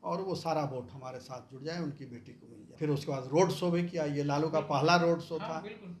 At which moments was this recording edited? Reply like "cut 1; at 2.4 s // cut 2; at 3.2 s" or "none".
cut 1; at 2.7 s